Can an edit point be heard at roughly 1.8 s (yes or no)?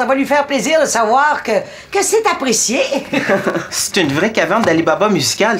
no